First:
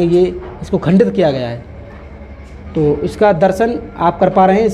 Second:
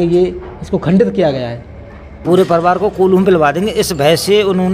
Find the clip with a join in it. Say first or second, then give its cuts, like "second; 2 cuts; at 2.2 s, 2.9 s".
second; 1 cut; at 2.1 s